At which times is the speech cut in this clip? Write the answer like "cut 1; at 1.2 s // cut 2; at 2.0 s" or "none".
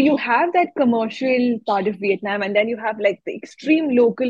none